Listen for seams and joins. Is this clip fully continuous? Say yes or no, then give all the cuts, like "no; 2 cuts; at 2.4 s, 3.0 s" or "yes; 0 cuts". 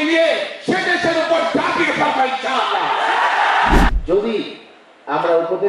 no; 1 cut; at 3.9 s